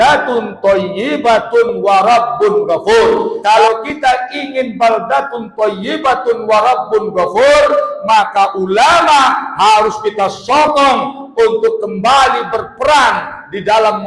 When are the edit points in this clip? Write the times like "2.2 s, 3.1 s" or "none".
3.4 s